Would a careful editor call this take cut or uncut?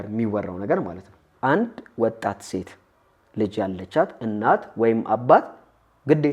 cut